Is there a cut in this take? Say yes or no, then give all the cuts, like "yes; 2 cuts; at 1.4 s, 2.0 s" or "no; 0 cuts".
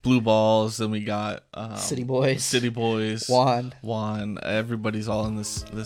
no; 0 cuts